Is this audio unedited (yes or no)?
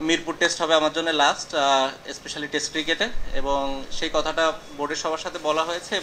yes